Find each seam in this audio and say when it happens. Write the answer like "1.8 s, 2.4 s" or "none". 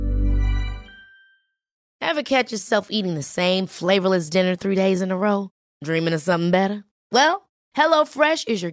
1.9 s